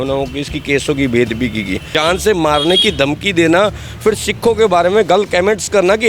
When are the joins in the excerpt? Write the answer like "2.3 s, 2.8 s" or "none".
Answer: 1.9 s